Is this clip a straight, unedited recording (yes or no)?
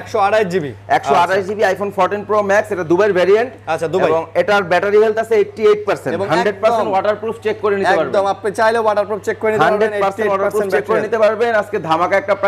yes